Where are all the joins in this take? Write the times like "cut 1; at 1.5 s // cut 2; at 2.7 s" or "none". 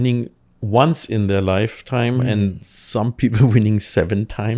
none